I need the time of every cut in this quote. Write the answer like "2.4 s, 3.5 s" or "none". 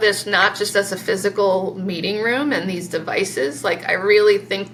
none